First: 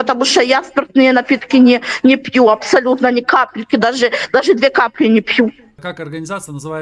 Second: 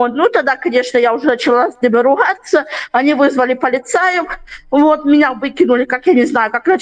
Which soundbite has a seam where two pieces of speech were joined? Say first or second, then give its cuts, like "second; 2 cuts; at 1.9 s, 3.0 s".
first; 1 cut; at 5.7 s